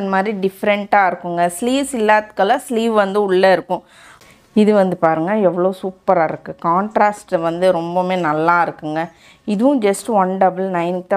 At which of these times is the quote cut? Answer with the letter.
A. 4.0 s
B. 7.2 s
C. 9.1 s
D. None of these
A